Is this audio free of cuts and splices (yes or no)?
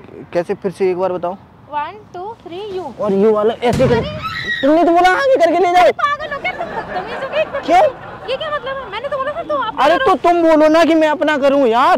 yes